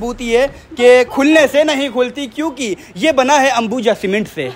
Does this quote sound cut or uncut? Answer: uncut